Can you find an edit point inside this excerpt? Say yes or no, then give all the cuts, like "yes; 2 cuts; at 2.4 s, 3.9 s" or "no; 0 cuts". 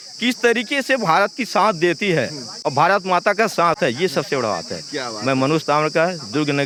no; 0 cuts